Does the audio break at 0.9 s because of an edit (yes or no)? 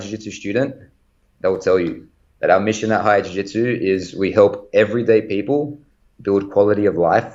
no